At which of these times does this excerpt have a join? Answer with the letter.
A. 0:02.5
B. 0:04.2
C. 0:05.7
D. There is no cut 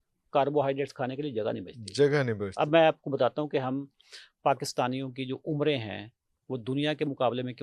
D